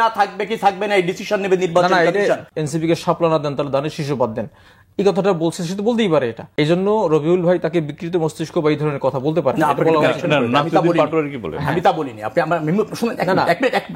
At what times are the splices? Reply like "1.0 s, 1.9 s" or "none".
2.5 s, 6.4 s